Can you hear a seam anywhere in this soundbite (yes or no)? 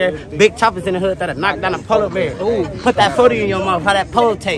no